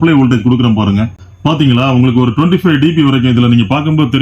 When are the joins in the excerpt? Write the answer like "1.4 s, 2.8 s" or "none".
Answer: 1.2 s